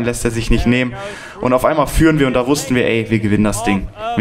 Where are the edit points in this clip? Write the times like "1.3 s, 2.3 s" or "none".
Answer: none